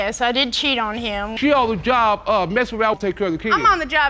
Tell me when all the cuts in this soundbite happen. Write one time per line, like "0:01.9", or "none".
0:01.4